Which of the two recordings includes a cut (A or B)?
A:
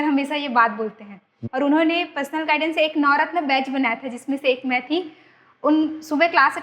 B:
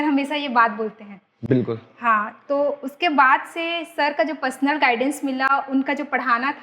A